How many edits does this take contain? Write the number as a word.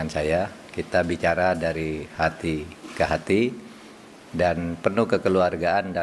zero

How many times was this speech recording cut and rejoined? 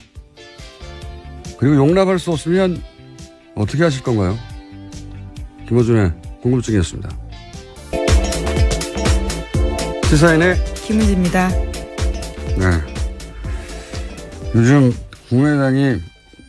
zero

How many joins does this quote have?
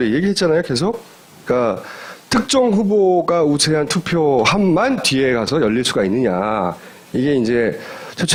zero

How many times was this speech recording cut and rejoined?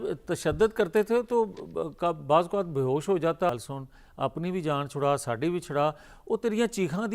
one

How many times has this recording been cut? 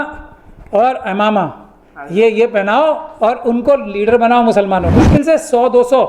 one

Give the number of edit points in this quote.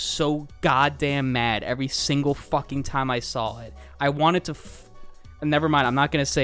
zero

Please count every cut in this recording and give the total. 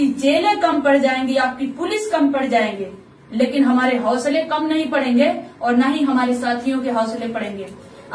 zero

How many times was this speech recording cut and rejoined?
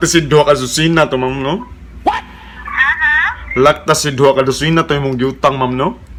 zero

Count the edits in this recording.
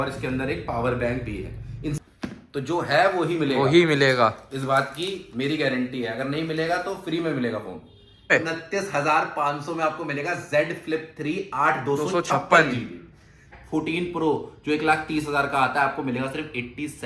three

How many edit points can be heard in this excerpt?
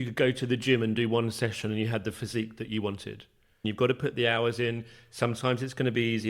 one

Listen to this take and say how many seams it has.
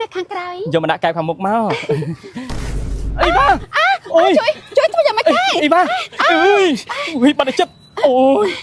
zero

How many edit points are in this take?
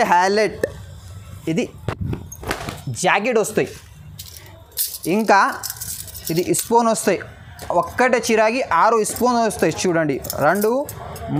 zero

